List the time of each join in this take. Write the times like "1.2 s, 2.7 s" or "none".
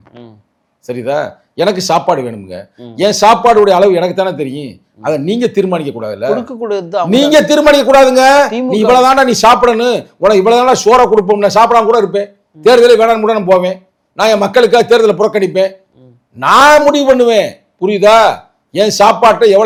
none